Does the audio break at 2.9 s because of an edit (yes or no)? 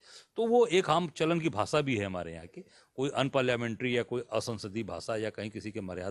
no